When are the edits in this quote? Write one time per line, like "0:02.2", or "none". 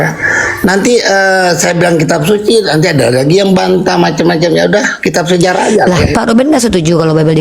0:06.1

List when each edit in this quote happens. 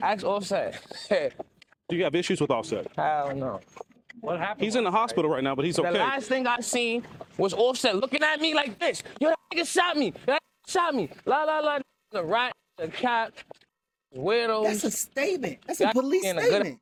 none

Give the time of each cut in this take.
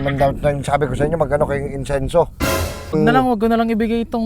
0:02.9

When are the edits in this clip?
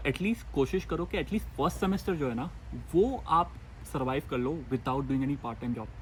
none

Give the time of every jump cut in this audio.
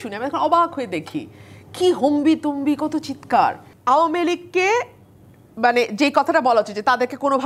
0:03.7

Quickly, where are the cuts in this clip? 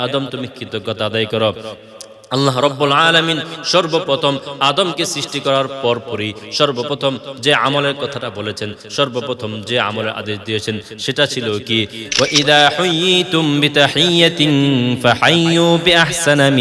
0:11.9

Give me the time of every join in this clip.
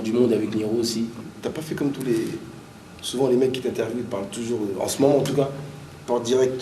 0:01.3

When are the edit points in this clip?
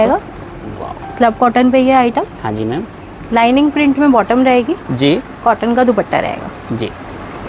none

